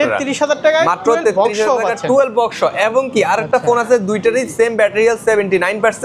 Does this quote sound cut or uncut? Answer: uncut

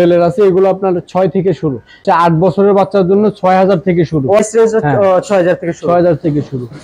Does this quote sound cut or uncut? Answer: uncut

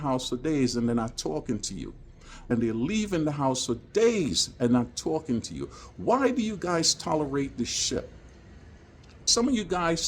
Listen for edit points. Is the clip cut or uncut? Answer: cut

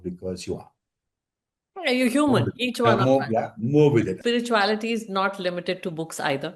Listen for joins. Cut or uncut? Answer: cut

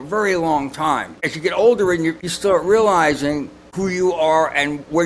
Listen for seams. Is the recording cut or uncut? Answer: cut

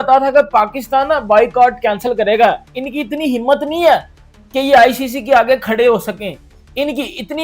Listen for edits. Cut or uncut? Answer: uncut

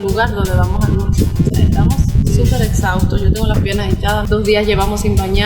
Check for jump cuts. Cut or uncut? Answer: cut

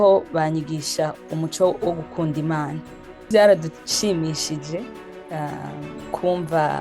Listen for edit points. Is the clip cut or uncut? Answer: cut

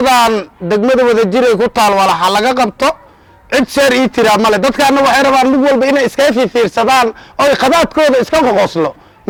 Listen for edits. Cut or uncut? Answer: uncut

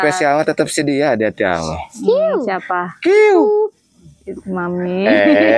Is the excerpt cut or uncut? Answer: uncut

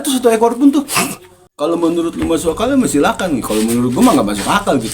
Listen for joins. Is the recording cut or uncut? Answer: cut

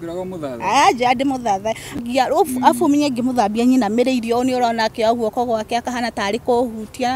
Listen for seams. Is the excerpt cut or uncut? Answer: cut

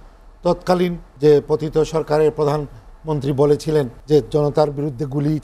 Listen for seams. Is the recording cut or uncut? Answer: cut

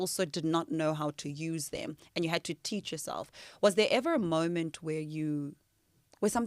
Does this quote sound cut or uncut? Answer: uncut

